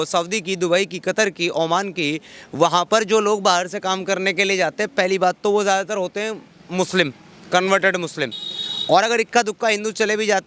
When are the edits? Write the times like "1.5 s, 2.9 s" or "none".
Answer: none